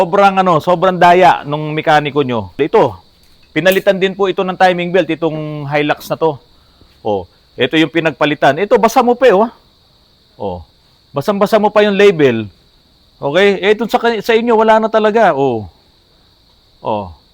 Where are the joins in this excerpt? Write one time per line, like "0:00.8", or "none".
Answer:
0:02.5